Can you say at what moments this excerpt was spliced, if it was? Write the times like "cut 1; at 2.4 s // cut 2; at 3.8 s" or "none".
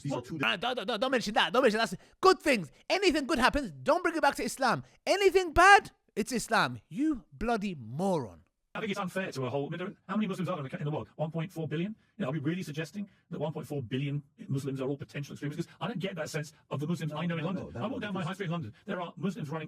cut 1; at 8.8 s